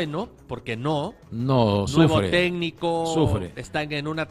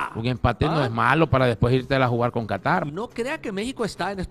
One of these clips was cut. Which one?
second; 1 cut; at 2.9 s

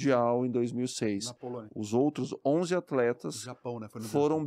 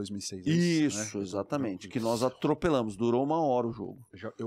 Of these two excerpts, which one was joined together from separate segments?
first; 1 cut; at 1.7 s

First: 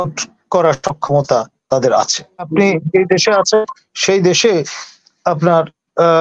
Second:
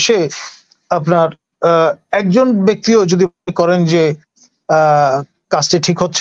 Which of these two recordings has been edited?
first; 1 cut; at 2.5 s

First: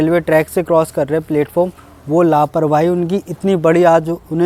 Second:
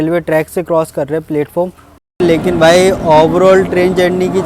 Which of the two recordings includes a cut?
second; 1 cut; at 2.2 s

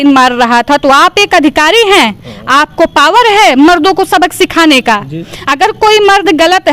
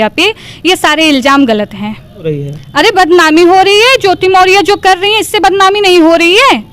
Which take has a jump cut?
second; 1 cut; at 2.3 s

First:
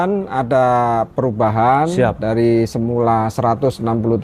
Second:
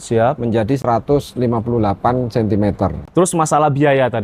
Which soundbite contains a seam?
second; 1 cut; at 3.0 s

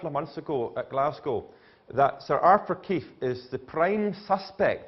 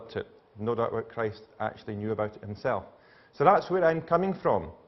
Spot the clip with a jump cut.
first; 1 cut; at 4.0 s

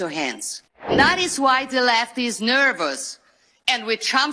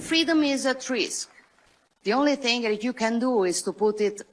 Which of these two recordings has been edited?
first; 1 cut; at 0.9 s

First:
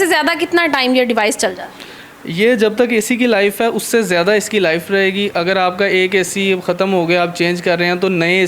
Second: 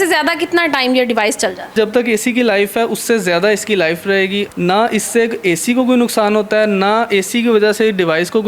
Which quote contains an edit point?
second; 2 cuts; at 1.7 s, 4.5 s

